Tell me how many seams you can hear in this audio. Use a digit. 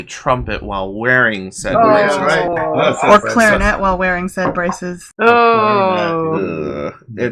1